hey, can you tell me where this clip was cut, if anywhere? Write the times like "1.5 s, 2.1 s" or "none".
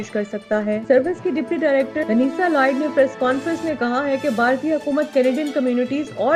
none